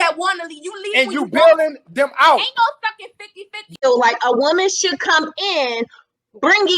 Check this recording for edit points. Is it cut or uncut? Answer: cut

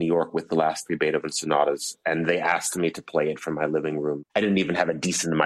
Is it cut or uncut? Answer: cut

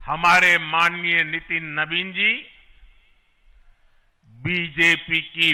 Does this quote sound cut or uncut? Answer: uncut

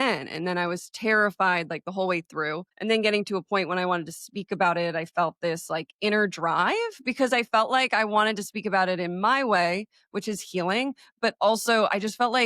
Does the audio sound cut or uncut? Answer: cut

